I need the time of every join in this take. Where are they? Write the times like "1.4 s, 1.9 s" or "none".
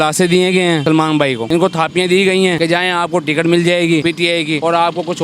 1.0 s, 2.6 s, 4.3 s